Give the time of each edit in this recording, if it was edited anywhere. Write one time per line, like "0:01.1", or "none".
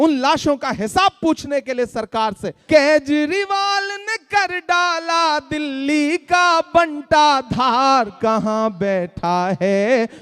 0:02.5